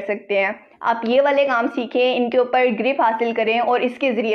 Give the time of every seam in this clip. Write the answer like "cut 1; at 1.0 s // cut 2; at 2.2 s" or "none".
none

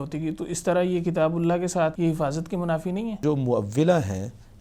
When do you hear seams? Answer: cut 1; at 1.9 s // cut 2; at 3.2 s

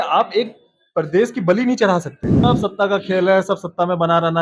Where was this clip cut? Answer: cut 1; at 2.2 s

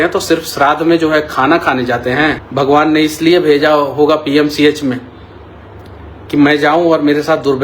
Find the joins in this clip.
cut 1; at 2.4 s

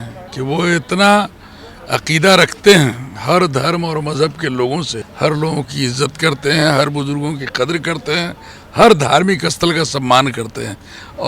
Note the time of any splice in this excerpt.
cut 1; at 5.0 s

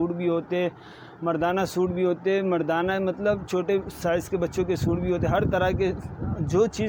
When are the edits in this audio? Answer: none

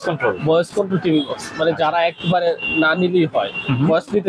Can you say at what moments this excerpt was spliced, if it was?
none

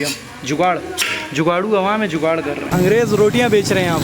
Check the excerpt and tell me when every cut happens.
cut 1; at 2.7 s

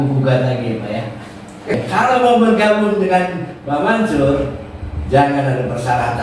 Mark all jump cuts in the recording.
cut 1; at 1.7 s

